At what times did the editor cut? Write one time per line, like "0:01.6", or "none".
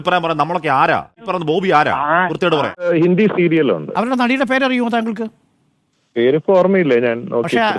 0:01.2
0:02.9